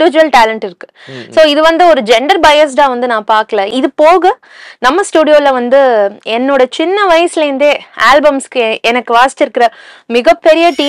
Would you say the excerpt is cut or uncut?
cut